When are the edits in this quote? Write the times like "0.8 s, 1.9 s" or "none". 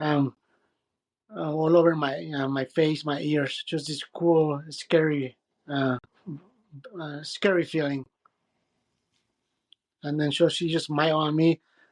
none